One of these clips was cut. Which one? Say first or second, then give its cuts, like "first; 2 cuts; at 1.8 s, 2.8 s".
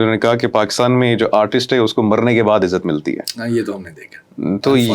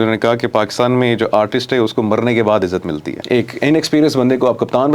second; 1 cut; at 3.1 s